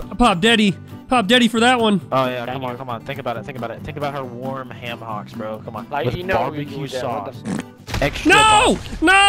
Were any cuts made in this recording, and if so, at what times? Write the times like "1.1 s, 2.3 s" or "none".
5.8 s